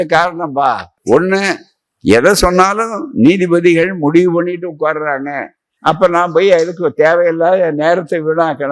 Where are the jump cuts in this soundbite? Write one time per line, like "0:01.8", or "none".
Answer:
0:00.9